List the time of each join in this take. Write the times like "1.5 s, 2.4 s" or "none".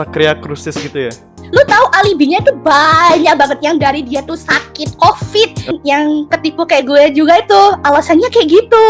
1.4 s, 5.7 s